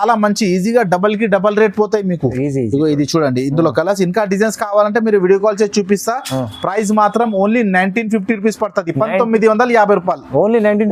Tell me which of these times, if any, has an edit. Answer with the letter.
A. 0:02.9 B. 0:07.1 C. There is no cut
C